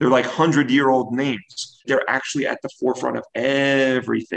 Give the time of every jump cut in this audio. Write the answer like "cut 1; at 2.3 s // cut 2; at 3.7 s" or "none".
cut 1; at 1.8 s